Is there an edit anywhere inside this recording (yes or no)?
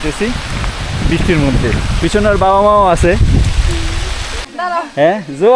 yes